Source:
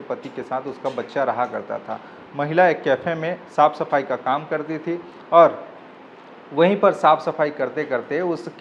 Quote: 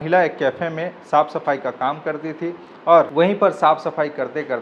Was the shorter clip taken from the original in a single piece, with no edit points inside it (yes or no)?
no